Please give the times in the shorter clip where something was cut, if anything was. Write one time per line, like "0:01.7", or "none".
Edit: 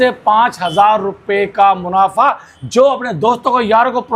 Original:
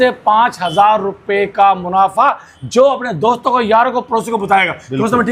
none